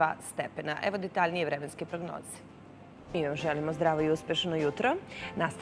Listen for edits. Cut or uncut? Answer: uncut